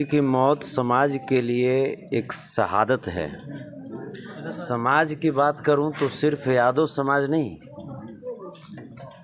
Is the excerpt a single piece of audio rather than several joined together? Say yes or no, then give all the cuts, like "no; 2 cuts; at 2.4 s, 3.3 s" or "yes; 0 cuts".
yes; 0 cuts